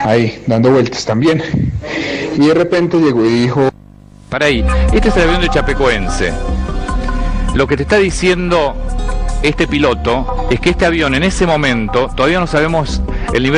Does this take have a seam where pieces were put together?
no; 0 cuts

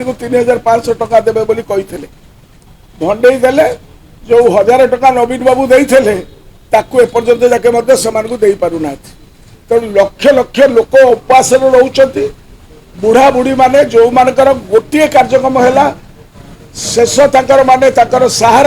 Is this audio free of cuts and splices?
yes; 0 cuts

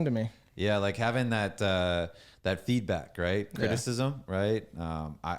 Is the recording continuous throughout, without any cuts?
yes; 0 cuts

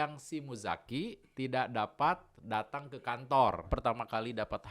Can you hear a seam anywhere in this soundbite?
yes; 1 cut; at 3.7 s

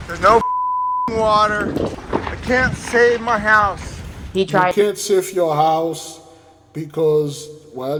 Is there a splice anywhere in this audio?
no; 0 cuts

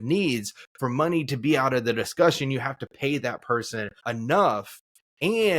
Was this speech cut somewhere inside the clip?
yes; 1 cut; at 3.9 s

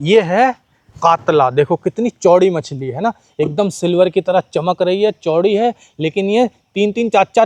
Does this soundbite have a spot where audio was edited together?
no; 0 cuts

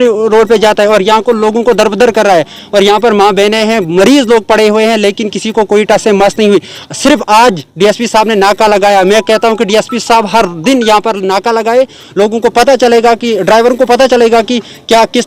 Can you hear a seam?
no; 0 cuts

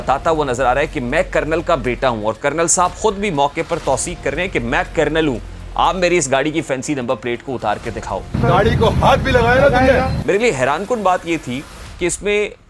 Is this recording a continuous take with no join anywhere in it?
yes; 0 cuts

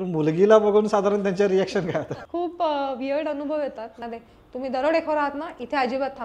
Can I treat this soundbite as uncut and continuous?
no; 2 cuts; at 2.2 s, 3.9 s

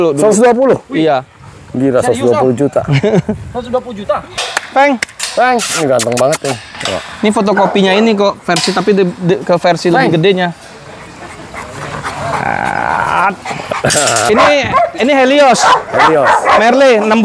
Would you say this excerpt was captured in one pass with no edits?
no; 2 cuts; at 4.4 s, 14.3 s

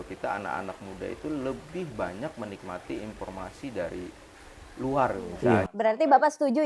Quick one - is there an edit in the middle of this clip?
yes; 1 cut; at 5.7 s

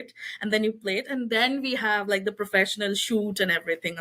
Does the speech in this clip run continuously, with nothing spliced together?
yes; 0 cuts

